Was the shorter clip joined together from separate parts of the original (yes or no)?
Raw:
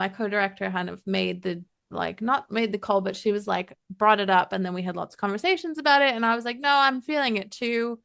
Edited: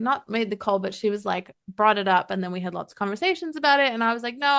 no